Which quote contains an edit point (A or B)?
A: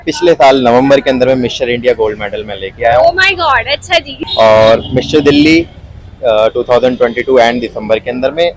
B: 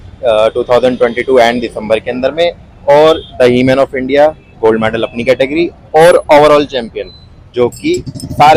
A